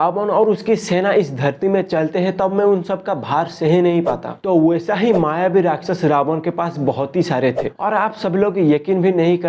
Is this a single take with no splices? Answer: no; 2 cuts; at 4.3 s, 7.6 s

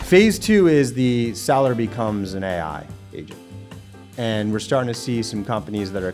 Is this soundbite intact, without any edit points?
yes; 0 cuts

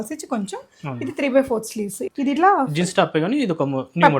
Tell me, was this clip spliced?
yes; 1 cut; at 2.0 s

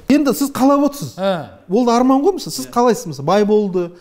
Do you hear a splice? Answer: no; 0 cuts

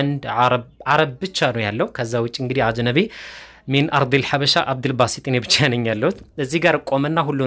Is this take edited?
no; 0 cuts

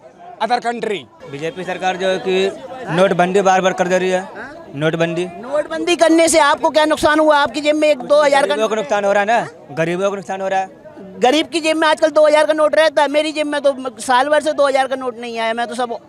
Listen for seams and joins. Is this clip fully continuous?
no; 1 cut; at 1.2 s

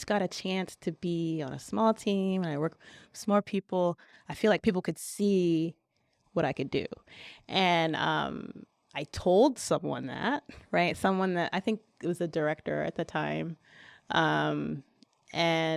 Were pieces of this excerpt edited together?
no; 0 cuts

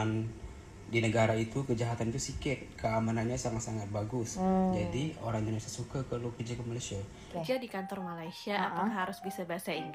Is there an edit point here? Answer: yes; 1 cut; at 7.3 s

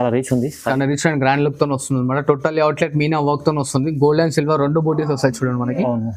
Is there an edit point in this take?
no; 0 cuts

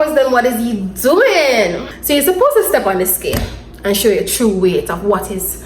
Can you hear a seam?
yes; 1 cut; at 1.9 s

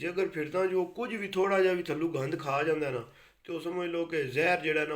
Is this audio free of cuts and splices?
yes; 0 cuts

